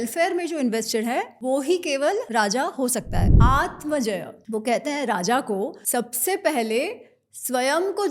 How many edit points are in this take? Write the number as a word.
five